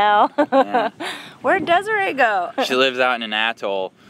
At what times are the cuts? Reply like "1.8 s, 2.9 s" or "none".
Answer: 2.5 s